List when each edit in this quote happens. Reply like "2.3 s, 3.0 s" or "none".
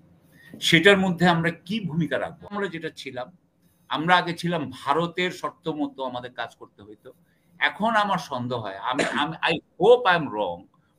2.5 s